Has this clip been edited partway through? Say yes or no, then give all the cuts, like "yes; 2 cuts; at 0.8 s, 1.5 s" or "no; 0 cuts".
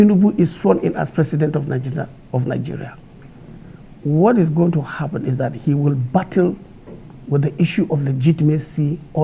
no; 0 cuts